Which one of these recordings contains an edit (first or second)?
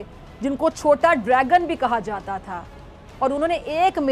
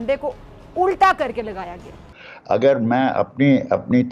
second